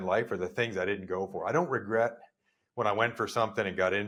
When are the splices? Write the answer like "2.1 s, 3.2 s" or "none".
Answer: none